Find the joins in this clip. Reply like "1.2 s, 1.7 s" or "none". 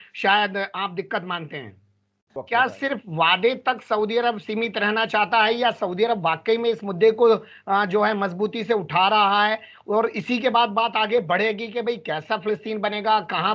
2.4 s